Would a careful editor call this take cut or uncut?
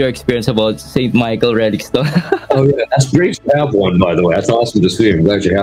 uncut